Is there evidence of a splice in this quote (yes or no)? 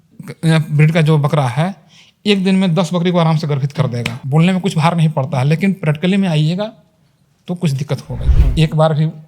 yes